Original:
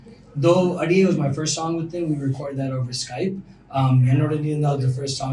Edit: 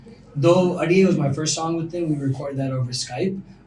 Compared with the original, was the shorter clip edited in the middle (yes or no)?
no